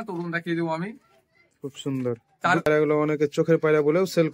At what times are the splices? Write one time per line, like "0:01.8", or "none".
0:02.7

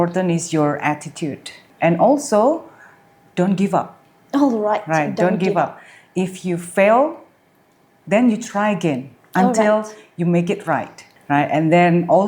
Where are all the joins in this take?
0:01.7
0:11.0

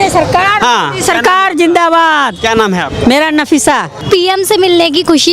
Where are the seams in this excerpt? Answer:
0:04.0

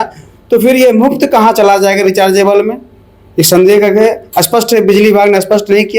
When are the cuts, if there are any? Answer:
none

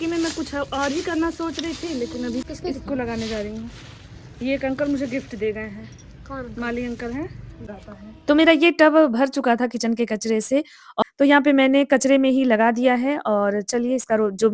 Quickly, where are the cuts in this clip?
0:02.4
0:07.7
0:11.0

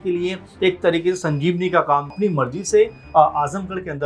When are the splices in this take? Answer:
0:02.1

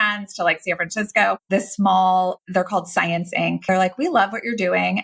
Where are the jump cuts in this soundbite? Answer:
0:01.4
0:02.4
0:03.6

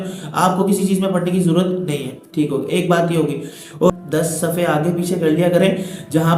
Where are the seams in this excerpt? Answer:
0:03.9

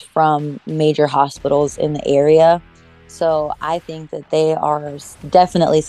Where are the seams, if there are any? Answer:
none

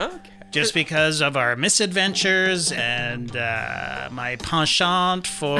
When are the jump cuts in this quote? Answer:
0:02.8

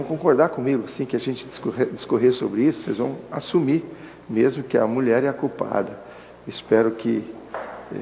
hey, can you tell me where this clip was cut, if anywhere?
0:02.0

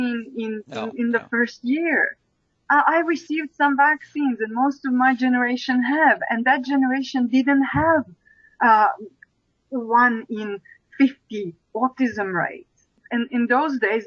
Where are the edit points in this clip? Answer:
0:13.0

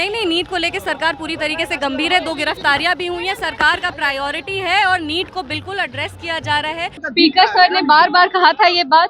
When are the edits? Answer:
0:07.0

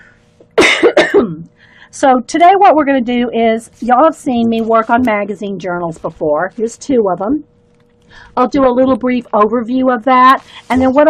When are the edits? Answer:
0:07.8

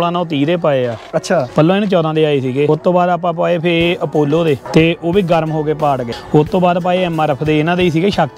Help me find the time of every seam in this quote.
0:01.5
0:02.7
0:04.6
0:06.1

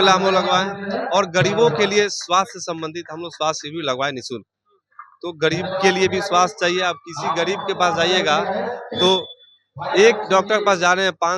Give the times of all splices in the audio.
none

